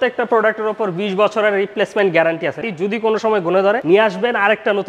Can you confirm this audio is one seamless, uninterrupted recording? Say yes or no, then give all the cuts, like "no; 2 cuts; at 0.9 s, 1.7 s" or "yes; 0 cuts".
no; 2 cuts; at 2.6 s, 3.8 s